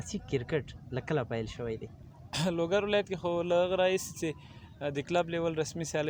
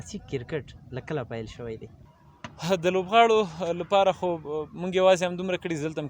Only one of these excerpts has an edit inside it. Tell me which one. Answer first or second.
second